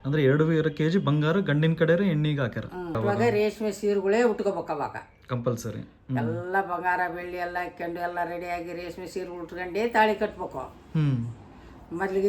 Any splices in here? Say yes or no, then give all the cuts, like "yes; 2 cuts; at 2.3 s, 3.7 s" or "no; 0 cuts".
yes; 1 cut; at 3.0 s